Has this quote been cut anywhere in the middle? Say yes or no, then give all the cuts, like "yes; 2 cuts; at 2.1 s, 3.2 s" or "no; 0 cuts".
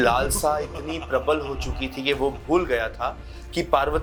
no; 0 cuts